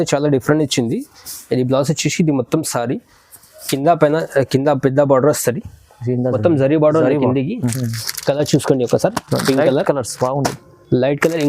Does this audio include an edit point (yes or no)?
yes